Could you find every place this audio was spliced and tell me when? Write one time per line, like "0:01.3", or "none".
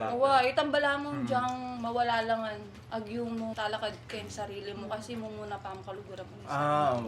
0:01.7
0:02.7
0:03.5